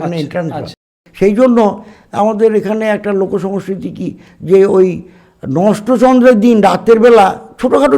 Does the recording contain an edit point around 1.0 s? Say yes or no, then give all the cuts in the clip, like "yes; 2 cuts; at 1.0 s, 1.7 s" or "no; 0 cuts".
yes; 1 cut; at 1.0 s